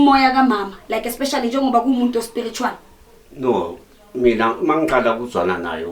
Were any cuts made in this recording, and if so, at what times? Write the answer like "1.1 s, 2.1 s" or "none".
none